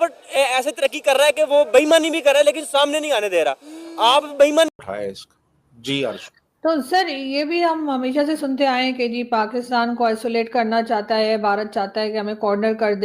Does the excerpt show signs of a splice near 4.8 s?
yes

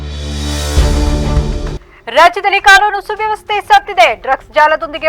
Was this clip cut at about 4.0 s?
no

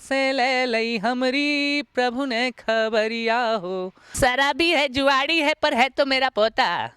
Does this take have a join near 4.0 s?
yes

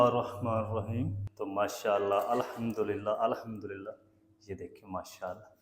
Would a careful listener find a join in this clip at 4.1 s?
no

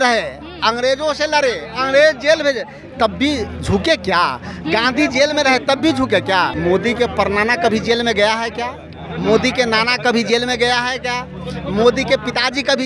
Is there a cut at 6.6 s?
yes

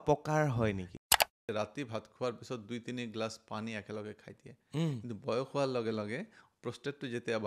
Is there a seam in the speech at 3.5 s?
no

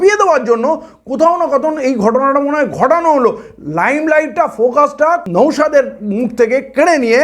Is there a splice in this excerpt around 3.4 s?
no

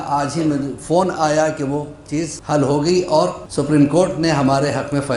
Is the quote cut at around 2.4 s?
yes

